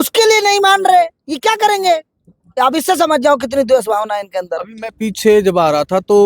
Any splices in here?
no; 0 cuts

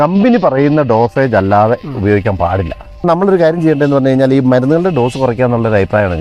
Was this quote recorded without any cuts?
no; 1 cut; at 3.0 s

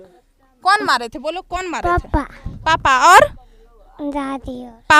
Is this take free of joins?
yes; 0 cuts

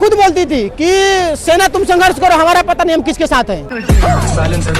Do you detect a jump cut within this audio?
yes; 1 cut; at 3.7 s

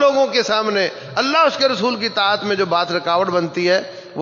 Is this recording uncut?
yes; 0 cuts

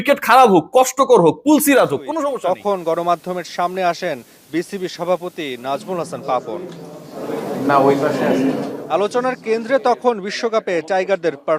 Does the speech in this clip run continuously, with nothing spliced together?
no; 1 cut; at 2.1 s

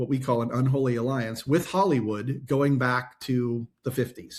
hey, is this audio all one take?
yes; 0 cuts

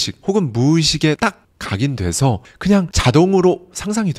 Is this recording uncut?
no; 1 cut; at 1.2 s

